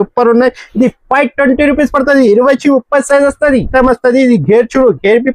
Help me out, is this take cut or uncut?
cut